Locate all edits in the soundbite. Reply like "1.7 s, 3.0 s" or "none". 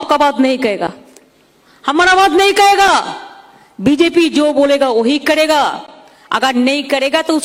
none